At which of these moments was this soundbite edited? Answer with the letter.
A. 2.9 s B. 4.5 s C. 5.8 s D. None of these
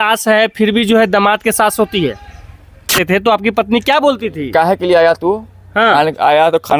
A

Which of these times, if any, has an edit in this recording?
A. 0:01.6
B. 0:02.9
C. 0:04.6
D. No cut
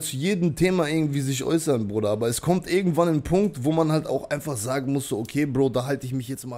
D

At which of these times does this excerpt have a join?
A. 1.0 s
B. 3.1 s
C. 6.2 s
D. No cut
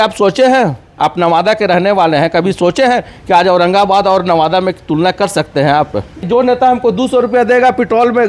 C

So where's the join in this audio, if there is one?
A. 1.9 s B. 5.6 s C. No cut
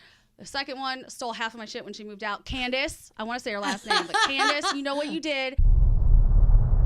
B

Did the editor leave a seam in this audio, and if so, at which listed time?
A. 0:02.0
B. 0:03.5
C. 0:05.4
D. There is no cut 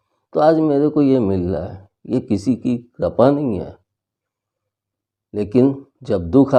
D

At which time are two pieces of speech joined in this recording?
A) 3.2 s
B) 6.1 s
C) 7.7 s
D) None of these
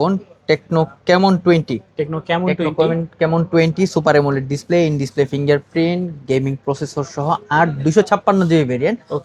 D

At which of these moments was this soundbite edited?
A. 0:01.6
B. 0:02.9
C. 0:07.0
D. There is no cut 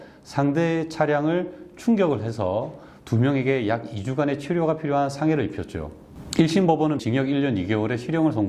C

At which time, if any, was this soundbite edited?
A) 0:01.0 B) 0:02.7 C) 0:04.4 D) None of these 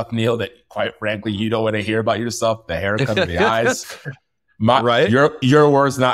D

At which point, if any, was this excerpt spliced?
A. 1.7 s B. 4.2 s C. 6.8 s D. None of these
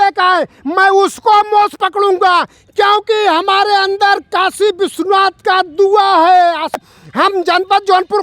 C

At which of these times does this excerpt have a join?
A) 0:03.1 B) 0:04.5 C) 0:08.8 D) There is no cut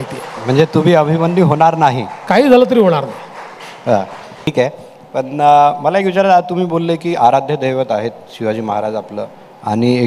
B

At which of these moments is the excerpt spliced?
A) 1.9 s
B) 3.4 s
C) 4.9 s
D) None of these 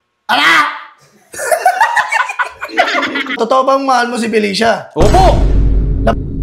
B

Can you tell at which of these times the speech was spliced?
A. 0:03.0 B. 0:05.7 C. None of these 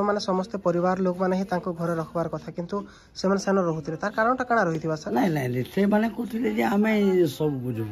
C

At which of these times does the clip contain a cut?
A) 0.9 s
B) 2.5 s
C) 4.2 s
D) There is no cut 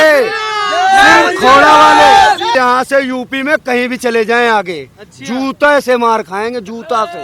B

